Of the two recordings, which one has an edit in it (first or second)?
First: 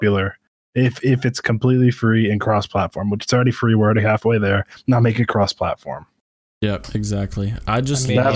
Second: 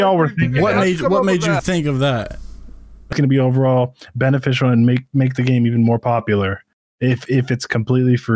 second